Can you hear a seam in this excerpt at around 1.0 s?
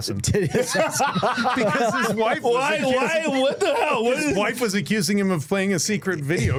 no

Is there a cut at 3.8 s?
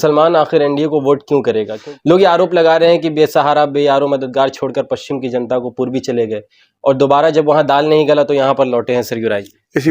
no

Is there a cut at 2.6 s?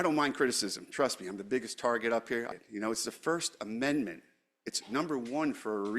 yes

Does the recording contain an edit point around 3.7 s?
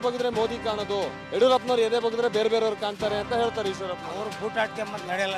no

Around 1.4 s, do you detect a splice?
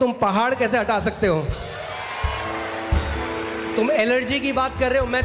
no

